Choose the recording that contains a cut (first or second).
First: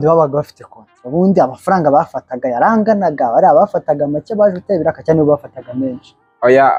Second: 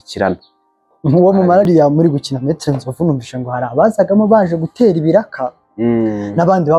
second